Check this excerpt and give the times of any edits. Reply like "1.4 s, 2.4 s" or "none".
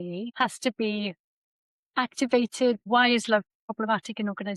2.8 s, 3.8 s